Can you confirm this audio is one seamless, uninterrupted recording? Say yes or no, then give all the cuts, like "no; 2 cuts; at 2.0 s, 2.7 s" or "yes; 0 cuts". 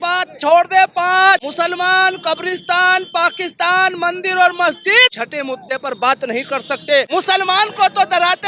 no; 3 cuts; at 1.5 s, 5.2 s, 7.1 s